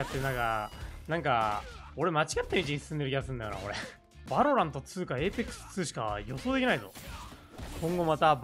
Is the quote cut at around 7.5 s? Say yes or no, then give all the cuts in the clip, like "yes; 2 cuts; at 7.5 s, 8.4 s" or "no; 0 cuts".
no; 1 cut; at 4.2 s